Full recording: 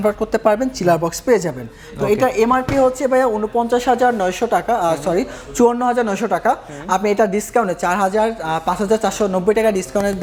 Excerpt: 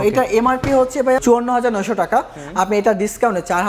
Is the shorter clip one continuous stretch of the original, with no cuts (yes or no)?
no